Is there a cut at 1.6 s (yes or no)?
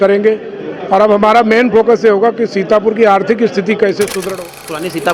no